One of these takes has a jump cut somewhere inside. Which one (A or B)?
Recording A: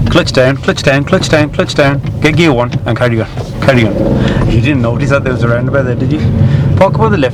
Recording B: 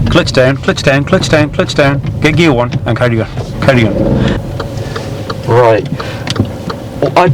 B